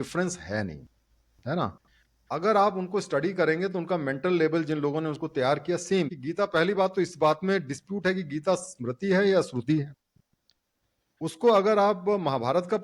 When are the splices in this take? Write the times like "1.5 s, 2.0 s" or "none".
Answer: 6.2 s